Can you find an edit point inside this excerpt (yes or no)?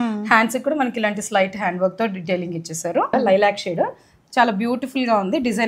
yes